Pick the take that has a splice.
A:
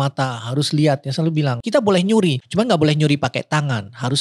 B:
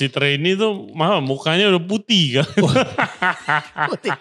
A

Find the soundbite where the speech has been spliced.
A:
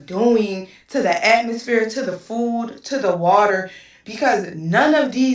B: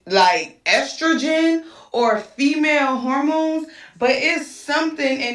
B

